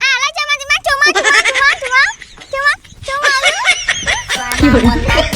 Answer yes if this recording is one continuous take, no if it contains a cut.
no